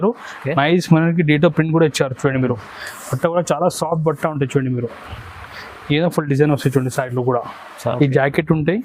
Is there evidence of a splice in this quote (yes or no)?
yes